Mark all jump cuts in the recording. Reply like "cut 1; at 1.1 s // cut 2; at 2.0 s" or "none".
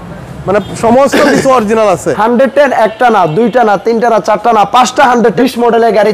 cut 1; at 2.1 s // cut 2; at 5.4 s